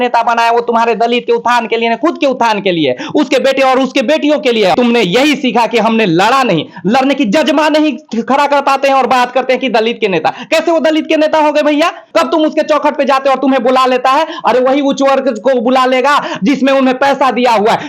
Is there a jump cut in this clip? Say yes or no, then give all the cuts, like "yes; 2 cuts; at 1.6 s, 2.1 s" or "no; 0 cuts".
yes; 2 cuts; at 4.7 s, 12.0 s